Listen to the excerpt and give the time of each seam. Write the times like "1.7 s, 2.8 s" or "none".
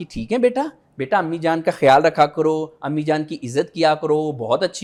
none